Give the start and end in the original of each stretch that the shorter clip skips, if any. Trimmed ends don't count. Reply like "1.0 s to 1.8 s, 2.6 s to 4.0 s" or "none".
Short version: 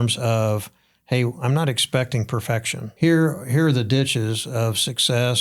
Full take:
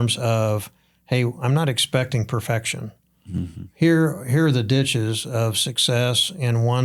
2.8 s to 3.6 s